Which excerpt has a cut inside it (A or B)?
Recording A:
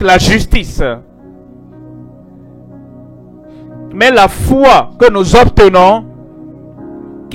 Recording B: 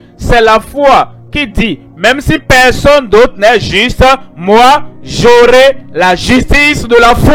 A